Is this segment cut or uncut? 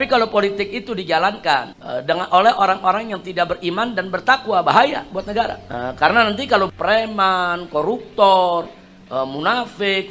uncut